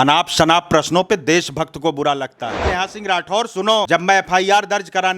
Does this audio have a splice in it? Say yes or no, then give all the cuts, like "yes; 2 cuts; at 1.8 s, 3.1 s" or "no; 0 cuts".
yes; 1 cut; at 2.7 s